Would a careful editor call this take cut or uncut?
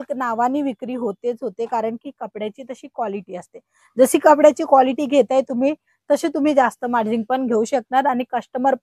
uncut